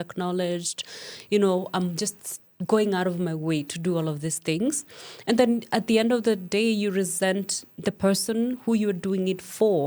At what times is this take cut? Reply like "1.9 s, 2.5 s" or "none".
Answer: none